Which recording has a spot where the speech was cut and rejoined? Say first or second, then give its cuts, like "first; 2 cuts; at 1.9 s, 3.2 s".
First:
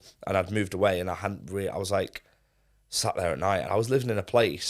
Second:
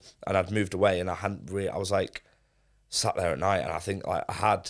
first; 1 cut; at 3.7 s